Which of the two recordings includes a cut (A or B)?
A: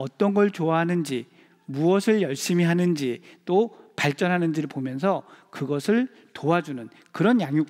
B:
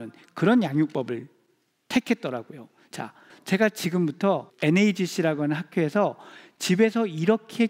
B